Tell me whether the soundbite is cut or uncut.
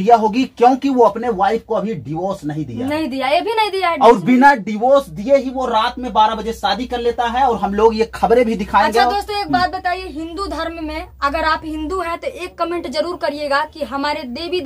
uncut